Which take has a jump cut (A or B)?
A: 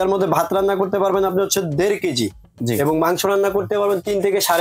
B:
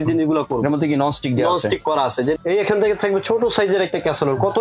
B